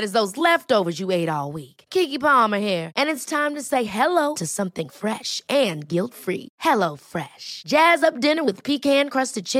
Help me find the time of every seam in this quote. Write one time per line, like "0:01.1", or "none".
none